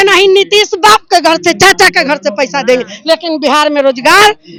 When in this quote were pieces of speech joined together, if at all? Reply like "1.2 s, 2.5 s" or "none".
none